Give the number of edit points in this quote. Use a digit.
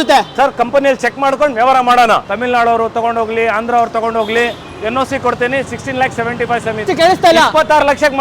2